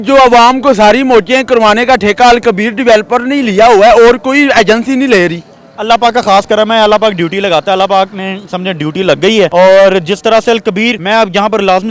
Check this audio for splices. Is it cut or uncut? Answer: uncut